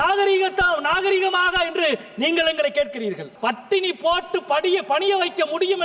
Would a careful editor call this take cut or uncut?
cut